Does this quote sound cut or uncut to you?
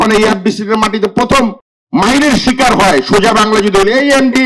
cut